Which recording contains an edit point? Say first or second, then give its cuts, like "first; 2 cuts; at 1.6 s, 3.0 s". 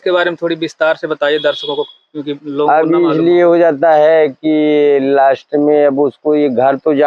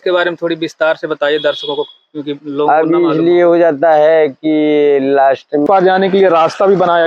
second; 1 cut; at 5.6 s